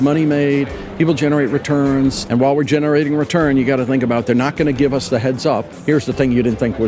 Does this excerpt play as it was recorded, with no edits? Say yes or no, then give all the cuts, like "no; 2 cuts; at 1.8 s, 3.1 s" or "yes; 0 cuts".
no; 2 cuts; at 2.2 s, 5.7 s